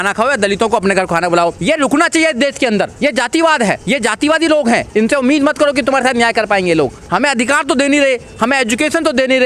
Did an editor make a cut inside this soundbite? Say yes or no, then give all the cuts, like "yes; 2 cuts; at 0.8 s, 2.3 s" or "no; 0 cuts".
yes; 5 cuts; at 1.6 s, 2.9 s, 3.8 s, 4.9 s, 7.0 s